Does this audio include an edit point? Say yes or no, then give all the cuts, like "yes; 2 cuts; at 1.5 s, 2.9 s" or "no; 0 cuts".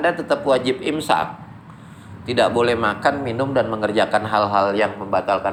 no; 0 cuts